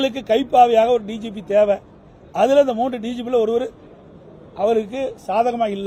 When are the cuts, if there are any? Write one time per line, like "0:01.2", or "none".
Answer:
none